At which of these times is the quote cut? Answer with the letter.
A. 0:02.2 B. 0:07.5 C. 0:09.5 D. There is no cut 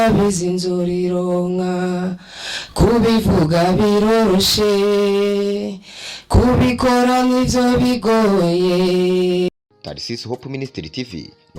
C